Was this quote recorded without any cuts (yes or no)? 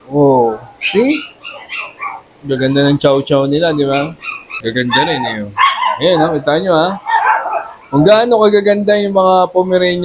no